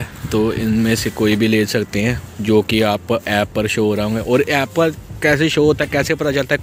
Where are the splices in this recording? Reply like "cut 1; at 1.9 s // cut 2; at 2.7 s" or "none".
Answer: none

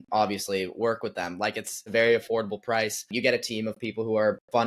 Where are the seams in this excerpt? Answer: cut 1; at 1.9 s // cut 2; at 3.0 s

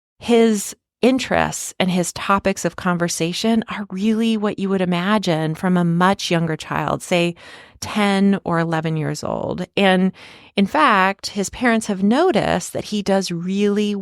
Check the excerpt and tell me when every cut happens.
cut 1; at 0.9 s

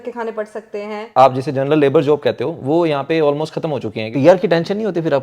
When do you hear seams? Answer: cut 1; at 1.1 s // cut 2; at 4.0 s

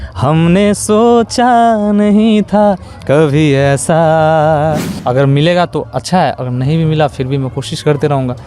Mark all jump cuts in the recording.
cut 1; at 4.9 s

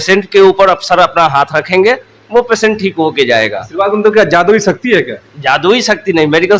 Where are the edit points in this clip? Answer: none

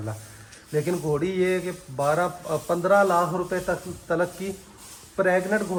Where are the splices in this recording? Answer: none

